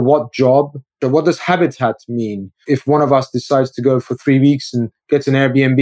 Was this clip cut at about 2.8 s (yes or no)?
yes